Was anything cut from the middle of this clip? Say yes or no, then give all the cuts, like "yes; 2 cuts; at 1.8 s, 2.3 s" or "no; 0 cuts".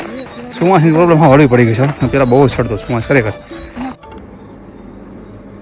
yes; 1 cut; at 3.9 s